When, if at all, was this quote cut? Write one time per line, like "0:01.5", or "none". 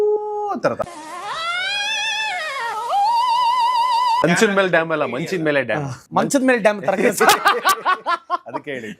0:04.2
0:05.9